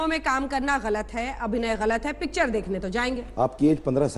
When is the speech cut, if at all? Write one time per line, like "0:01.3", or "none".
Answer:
0:03.3